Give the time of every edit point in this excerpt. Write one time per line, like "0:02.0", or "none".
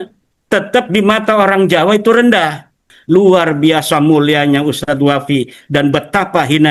0:02.9